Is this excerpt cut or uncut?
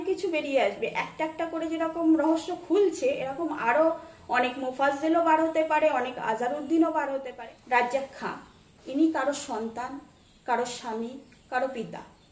cut